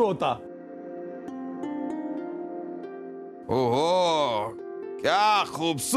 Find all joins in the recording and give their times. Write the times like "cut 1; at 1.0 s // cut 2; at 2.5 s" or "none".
cut 1; at 3.4 s